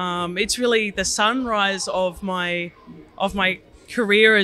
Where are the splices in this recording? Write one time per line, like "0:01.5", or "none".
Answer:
none